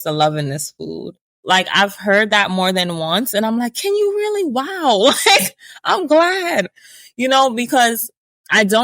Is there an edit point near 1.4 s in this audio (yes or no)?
yes